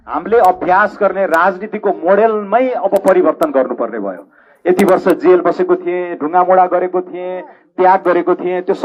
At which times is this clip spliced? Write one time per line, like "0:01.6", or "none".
none